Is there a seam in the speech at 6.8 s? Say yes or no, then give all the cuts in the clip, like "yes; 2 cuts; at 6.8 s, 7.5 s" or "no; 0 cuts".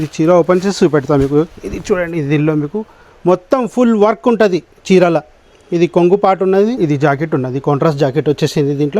yes; 1 cut; at 6.8 s